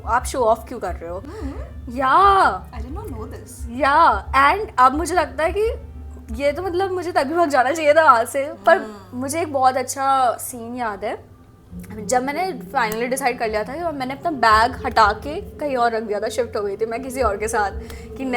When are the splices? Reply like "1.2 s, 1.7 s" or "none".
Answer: none